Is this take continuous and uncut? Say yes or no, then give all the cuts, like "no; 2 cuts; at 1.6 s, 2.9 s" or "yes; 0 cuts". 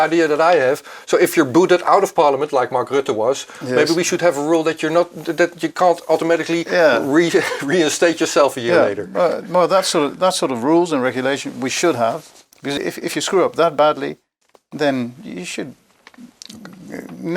no; 1 cut; at 12.8 s